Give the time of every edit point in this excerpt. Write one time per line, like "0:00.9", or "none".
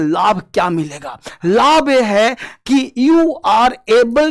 none